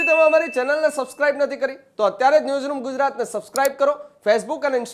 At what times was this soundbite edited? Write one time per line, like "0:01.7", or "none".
none

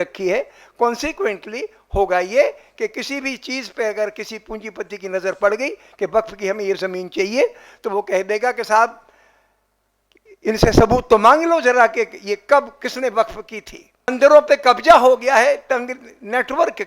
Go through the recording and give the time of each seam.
0:14.1

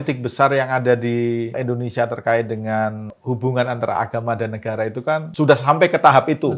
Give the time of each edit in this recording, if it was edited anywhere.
0:01.6
0:03.1
0:05.3

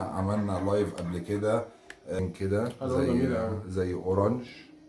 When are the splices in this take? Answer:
0:02.2

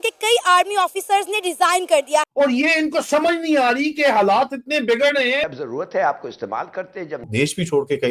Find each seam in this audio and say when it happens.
0:02.3
0:05.5
0:07.3

